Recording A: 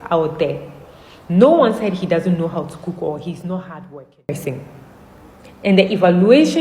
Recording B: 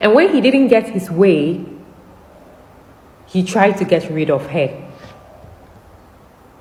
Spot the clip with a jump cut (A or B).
A